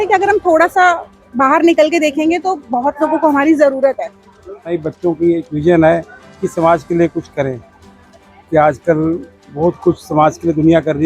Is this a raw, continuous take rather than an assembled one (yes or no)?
no